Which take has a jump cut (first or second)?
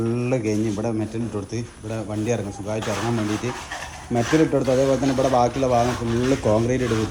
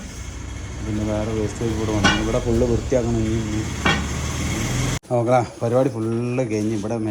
second